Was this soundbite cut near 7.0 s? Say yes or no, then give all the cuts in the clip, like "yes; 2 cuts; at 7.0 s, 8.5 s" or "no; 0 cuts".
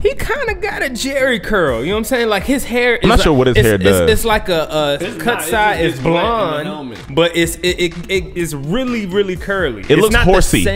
no; 0 cuts